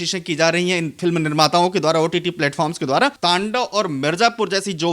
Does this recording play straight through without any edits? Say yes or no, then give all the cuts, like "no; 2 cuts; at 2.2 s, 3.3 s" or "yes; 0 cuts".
no; 1 cut; at 3.2 s